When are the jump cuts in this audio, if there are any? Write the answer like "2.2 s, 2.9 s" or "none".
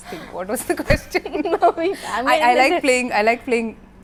none